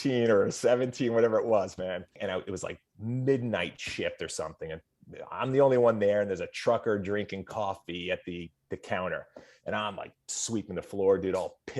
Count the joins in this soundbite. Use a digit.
1